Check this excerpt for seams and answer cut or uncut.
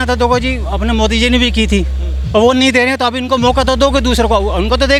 uncut